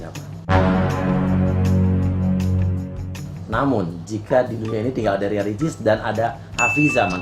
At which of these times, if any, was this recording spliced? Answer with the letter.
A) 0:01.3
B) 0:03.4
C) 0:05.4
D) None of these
B